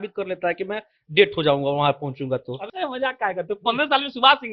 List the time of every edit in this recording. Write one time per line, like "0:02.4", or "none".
0:02.6